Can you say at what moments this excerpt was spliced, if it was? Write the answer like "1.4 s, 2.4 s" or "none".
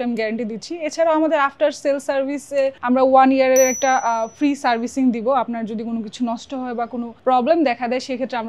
none